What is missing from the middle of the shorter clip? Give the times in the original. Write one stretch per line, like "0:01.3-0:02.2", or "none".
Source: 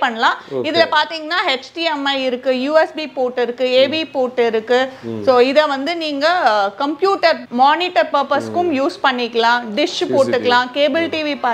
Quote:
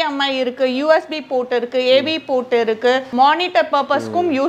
0:04.9-0:07.5